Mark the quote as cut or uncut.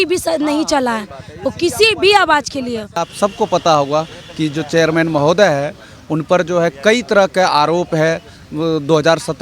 cut